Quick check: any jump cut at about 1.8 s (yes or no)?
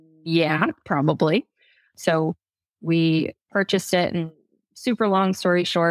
yes